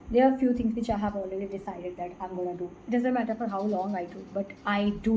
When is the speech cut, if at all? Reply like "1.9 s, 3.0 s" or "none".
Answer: none